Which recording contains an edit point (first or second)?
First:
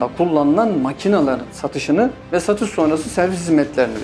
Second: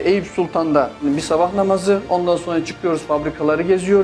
second